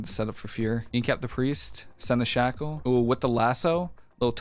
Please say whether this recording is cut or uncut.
cut